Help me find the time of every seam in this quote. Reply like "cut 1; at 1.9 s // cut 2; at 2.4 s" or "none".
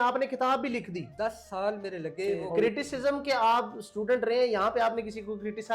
cut 1; at 2.5 s